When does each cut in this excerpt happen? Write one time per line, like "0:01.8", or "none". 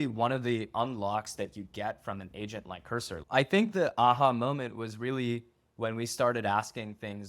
0:03.2